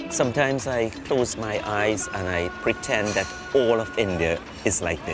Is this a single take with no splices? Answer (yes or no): yes